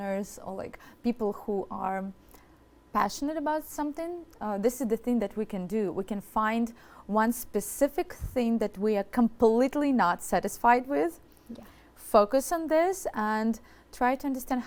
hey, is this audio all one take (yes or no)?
yes